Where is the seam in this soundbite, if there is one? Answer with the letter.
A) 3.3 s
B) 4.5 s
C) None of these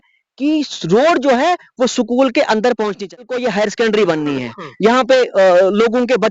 A